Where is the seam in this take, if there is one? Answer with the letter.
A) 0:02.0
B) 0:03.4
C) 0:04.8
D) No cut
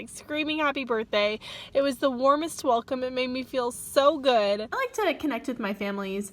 C